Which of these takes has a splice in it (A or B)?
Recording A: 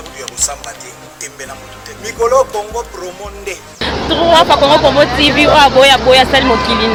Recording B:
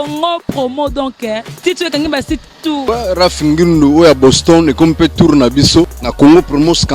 B